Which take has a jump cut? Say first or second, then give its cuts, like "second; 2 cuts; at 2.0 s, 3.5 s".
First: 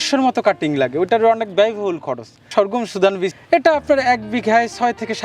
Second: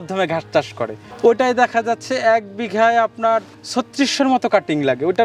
first; 1 cut; at 2.5 s